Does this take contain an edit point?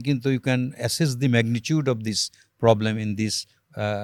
no; 0 cuts

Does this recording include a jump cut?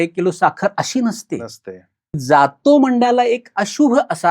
yes; 1 cut; at 2.2 s

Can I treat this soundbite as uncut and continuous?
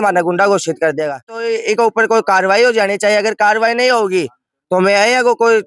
no; 1 cut; at 1.5 s

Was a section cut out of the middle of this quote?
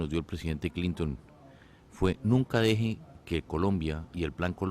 no; 0 cuts

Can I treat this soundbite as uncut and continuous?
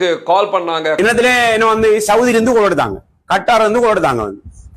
no; 1 cut; at 1.0 s

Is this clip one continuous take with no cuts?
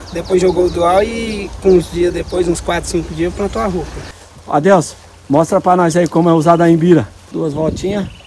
no; 2 cuts; at 4.1 s, 7.2 s

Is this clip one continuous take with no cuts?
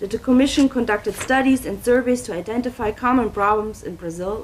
no; 1 cut; at 2.4 s

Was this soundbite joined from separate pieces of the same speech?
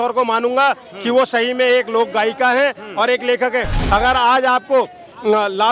yes; 1 cut; at 3.8 s

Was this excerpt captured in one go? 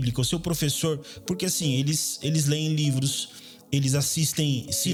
yes; 0 cuts

